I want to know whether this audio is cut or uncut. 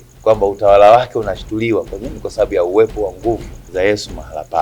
cut